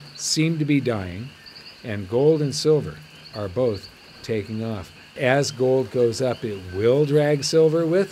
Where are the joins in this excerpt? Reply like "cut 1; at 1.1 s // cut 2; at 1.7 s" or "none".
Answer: cut 1; at 5.1 s